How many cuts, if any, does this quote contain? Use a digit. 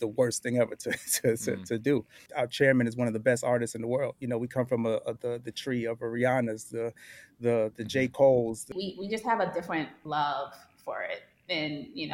3